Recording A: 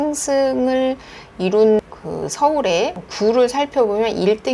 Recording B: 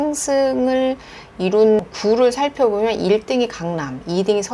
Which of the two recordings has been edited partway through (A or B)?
B